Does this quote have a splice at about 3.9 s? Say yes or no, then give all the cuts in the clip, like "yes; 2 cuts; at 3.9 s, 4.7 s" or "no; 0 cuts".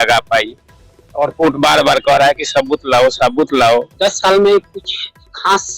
yes; 1 cut; at 3.9 s